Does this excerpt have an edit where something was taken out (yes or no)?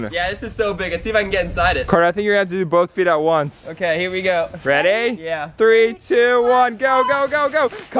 yes